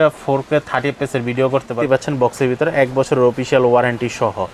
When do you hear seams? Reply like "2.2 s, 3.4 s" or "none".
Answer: 1.8 s